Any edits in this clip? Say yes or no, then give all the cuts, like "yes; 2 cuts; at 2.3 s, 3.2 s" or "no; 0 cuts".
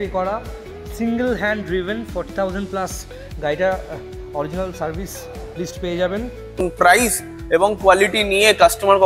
yes; 1 cut; at 6.6 s